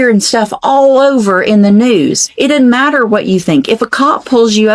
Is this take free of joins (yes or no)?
no